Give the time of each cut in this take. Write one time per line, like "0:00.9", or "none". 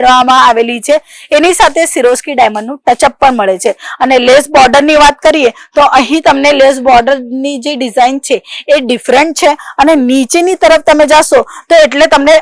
none